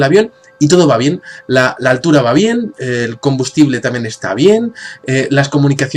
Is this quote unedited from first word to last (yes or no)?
no